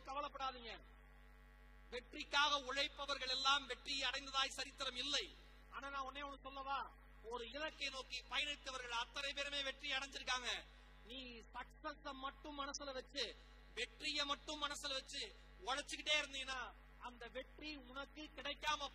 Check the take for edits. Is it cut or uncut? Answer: uncut